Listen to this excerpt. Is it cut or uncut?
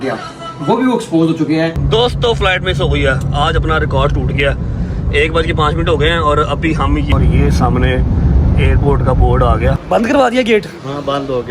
cut